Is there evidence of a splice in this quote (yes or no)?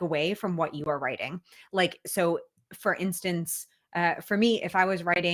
no